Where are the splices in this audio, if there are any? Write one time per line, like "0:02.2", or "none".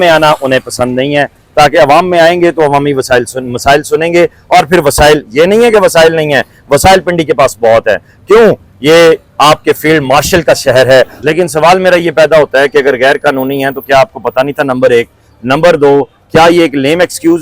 0:11.2